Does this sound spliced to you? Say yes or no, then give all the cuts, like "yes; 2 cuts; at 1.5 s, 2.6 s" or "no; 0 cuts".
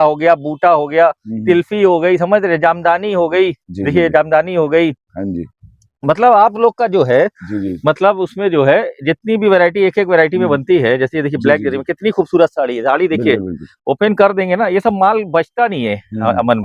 no; 0 cuts